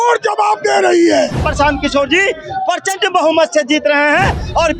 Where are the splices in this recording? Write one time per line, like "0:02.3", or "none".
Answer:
0:01.4